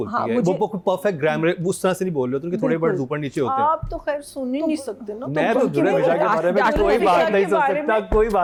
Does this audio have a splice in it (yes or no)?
no